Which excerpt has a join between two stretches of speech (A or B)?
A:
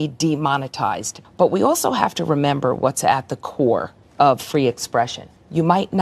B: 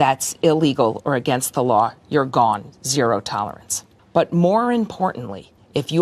A